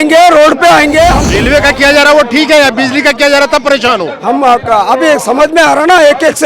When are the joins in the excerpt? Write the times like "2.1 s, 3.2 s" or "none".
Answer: 1.2 s

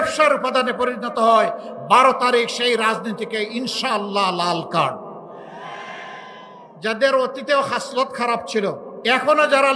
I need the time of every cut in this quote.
6.7 s, 8.9 s

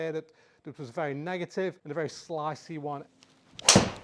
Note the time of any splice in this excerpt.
1.8 s, 3.1 s

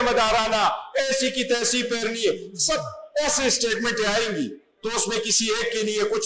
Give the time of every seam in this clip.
none

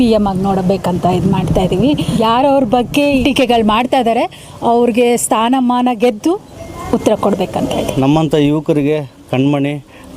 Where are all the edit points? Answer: 2.1 s, 3.2 s, 7.9 s

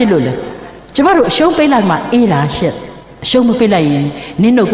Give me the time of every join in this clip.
none

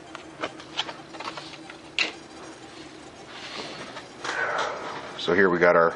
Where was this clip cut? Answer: 1.8 s

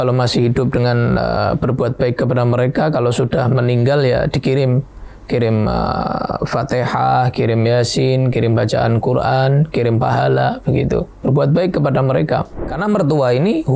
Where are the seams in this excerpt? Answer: 12.7 s

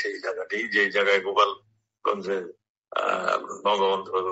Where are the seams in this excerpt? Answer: none

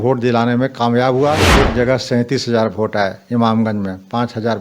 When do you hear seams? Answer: 1.5 s

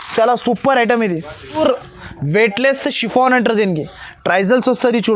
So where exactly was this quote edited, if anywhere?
1.6 s

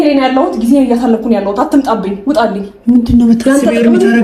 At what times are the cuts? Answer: none

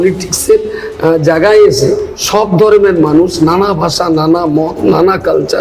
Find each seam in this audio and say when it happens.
none

